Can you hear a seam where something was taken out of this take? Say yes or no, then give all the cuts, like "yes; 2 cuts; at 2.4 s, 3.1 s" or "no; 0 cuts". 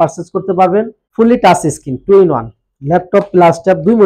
yes; 1 cut; at 1.0 s